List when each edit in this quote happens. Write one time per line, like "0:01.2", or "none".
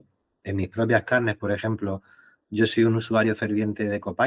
none